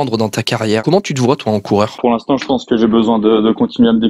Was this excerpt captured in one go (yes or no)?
no